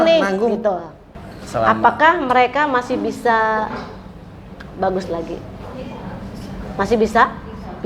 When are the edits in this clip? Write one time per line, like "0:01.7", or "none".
0:01.0